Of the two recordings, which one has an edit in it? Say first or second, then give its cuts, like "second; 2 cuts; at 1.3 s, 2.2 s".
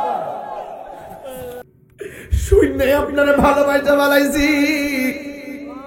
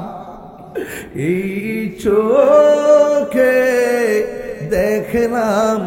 first; 1 cut; at 1.6 s